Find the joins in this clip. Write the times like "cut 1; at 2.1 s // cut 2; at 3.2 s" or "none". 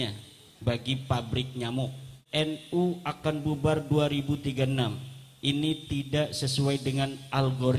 cut 1; at 2.3 s